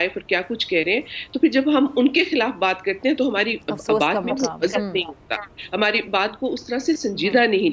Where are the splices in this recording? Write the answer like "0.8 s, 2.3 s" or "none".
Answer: none